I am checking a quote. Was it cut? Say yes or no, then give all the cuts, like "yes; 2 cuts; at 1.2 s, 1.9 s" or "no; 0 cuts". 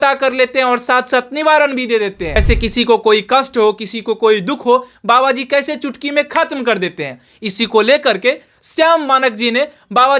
yes; 1 cut; at 2.4 s